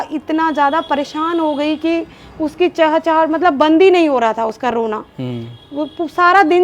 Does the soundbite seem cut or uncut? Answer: uncut